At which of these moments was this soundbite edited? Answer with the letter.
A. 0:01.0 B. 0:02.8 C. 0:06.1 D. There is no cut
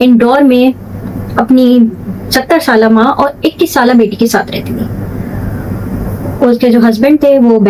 D